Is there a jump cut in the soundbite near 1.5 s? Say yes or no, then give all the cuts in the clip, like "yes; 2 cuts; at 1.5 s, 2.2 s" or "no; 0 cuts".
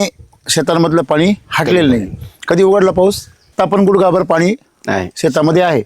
no; 1 cut; at 3.5 s